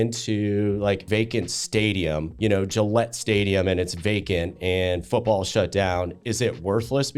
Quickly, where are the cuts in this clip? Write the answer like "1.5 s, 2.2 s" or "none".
1.0 s, 2.3 s